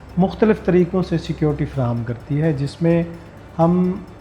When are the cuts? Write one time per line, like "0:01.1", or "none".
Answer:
none